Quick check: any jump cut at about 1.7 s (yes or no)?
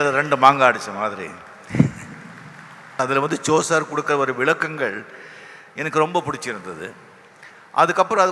no